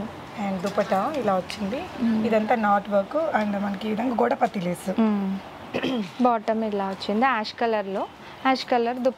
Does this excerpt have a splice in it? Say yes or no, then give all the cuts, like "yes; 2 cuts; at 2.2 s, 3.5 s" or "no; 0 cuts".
no; 0 cuts